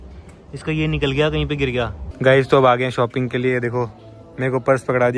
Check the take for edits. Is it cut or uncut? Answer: cut